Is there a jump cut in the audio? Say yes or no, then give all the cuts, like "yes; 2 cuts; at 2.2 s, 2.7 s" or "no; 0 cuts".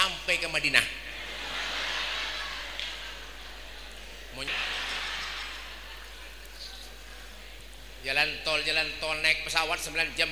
yes; 1 cut; at 4.4 s